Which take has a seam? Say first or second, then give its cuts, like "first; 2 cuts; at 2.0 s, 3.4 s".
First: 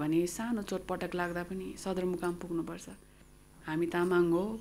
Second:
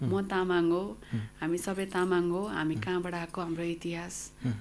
first; 1 cut; at 3.1 s